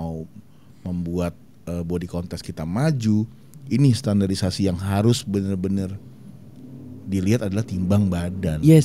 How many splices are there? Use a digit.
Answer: 0